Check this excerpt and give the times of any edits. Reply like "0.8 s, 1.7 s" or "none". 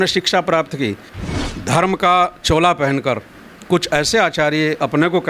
1.1 s